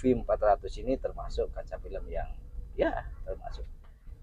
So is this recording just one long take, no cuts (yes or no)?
yes